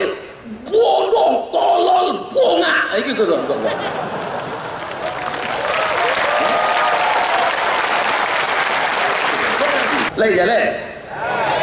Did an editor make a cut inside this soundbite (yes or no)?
yes